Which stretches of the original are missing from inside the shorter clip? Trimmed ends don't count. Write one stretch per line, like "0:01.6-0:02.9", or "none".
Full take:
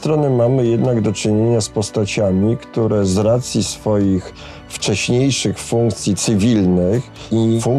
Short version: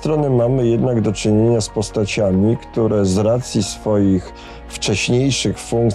none